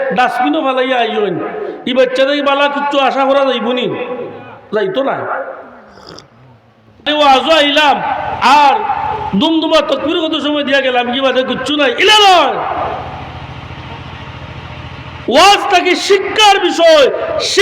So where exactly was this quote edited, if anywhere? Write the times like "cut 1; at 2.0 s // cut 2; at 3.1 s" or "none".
cut 1; at 7.1 s

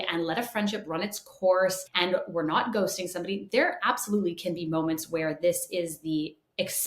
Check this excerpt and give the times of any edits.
cut 1; at 1.9 s

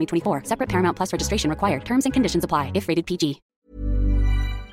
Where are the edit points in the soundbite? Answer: cut 1; at 3.5 s

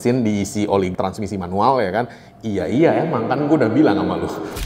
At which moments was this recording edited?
cut 1; at 0.9 s

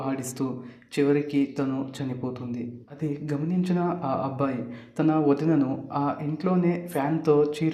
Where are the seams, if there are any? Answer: cut 1; at 2.8 s

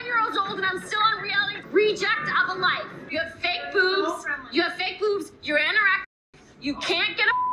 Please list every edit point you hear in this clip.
cut 1; at 1.6 s // cut 2; at 3.1 s

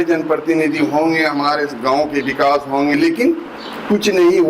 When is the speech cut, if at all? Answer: cut 1; at 2.9 s

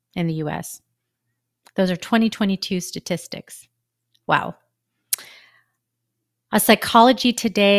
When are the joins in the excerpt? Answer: none

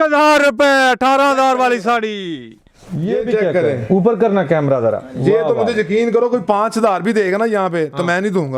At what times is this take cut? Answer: cut 1; at 2.9 s

